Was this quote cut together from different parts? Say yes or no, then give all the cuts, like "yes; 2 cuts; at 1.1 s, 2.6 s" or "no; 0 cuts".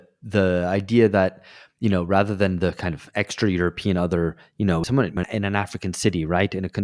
yes; 1 cut; at 5.0 s